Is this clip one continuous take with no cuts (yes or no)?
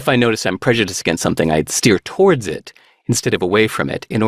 yes